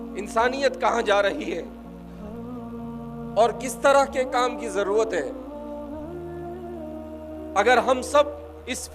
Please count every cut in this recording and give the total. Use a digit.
4